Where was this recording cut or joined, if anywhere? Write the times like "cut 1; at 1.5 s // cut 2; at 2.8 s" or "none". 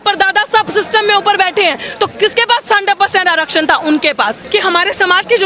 cut 1; at 4.4 s

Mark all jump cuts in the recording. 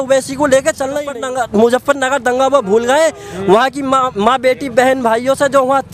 cut 1; at 1.1 s

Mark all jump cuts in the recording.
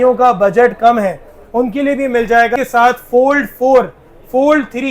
cut 1; at 2.6 s

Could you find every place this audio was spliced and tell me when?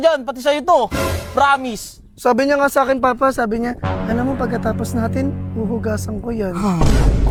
none

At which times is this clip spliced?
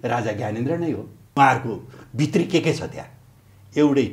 cut 1; at 1.2 s

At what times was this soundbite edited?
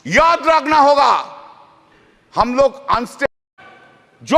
cut 1; at 3.2 s

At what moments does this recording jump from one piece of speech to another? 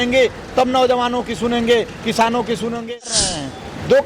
cut 1; at 3.1 s

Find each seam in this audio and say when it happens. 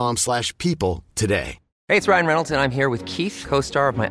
cut 1; at 1.7 s

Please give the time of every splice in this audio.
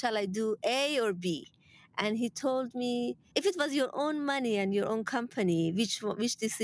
cut 1; at 3.2 s

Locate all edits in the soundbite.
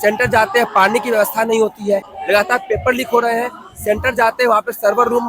cut 1; at 2.1 s

